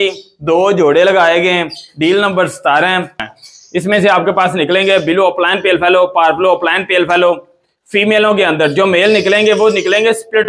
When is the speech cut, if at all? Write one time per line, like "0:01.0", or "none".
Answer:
0:03.2